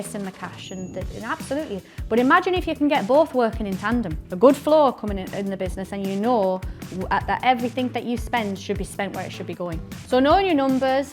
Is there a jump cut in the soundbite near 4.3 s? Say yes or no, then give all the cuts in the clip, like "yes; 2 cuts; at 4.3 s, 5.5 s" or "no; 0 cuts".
no; 1 cut; at 9.9 s